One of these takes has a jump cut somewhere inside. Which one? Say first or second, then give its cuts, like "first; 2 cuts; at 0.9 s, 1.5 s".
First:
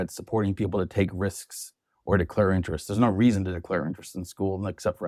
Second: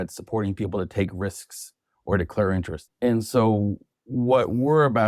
second; 1 cut; at 2.8 s